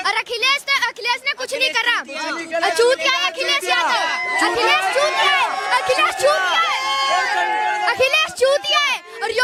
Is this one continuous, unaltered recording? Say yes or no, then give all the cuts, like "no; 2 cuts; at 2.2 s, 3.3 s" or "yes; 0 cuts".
yes; 0 cuts